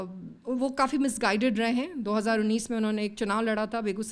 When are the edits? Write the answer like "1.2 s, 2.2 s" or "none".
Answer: none